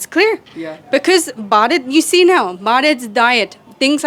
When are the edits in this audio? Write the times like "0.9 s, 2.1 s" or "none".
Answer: none